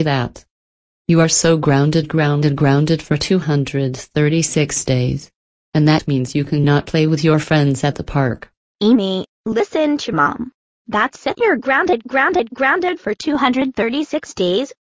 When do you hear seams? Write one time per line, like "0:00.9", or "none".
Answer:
none